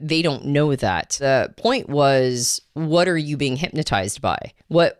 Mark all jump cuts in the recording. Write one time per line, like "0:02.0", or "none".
0:01.2